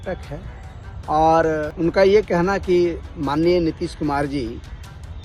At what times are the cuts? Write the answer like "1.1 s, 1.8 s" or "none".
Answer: 1.7 s